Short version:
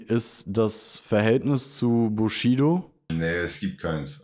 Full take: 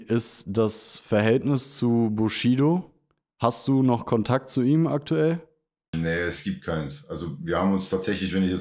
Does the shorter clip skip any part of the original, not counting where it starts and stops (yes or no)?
yes